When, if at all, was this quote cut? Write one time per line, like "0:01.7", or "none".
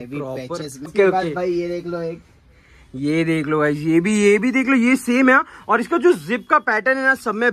0:00.9